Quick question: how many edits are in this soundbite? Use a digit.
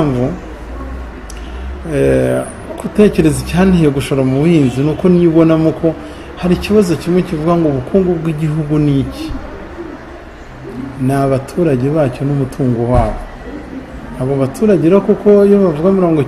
0